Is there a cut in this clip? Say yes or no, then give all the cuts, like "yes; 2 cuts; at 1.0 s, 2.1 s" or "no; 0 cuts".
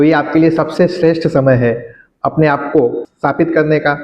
yes; 1 cut; at 3.0 s